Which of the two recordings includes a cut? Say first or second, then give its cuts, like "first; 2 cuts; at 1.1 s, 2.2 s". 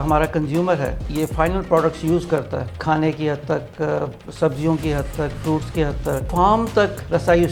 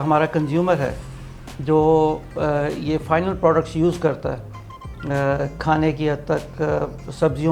first; 3 cuts; at 1.1 s, 2.8 s, 6.3 s